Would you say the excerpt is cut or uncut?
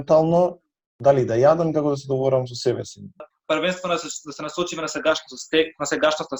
cut